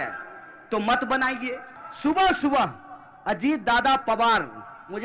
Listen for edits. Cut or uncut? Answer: cut